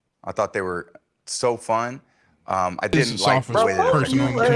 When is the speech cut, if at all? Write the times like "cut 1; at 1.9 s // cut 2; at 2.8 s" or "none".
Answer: cut 1; at 3.3 s